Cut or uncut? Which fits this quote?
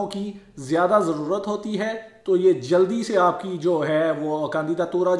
uncut